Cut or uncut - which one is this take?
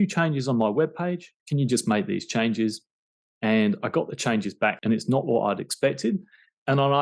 cut